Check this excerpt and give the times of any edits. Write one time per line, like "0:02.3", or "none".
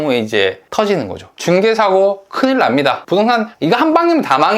0:01.3
0:03.3